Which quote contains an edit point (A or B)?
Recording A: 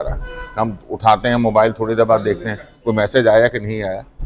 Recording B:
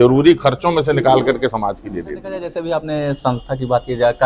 B